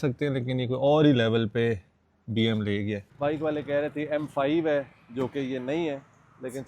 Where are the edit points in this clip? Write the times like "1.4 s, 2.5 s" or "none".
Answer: 3.1 s